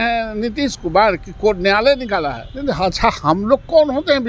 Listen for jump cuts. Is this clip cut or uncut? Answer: cut